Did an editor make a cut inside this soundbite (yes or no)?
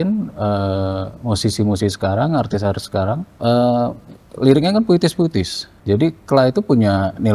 yes